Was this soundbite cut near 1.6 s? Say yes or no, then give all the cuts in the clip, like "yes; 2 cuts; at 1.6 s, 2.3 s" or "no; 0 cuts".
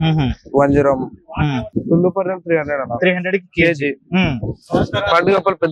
yes; 1 cut; at 1.6 s